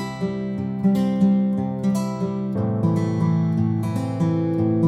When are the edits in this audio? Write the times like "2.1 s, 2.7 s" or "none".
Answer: none